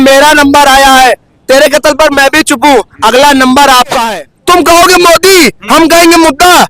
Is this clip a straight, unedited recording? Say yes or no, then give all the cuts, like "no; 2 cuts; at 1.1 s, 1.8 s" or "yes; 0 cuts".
no; 1 cut; at 4.0 s